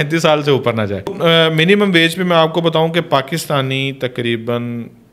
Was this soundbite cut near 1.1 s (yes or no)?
yes